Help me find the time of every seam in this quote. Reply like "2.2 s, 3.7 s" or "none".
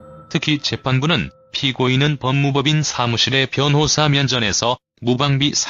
none